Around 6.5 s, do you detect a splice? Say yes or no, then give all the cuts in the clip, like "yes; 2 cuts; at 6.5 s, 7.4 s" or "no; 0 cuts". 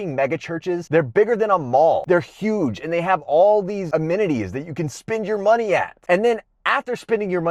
no; 3 cuts; at 0.8 s, 2.0 s, 3.9 s